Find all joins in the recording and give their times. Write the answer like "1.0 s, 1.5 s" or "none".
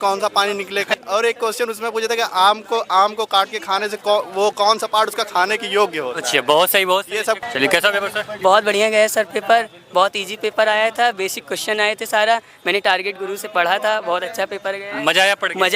0.9 s, 7.4 s